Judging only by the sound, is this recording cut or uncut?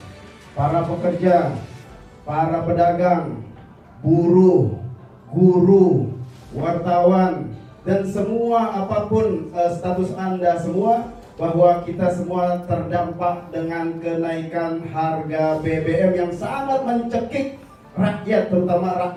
uncut